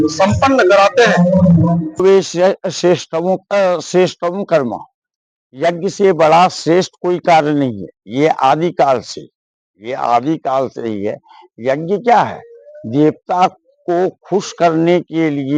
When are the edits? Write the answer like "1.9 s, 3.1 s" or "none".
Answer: 2.0 s